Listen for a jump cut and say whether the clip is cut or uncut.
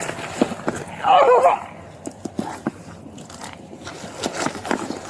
uncut